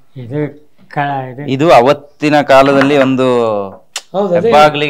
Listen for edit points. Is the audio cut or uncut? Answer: uncut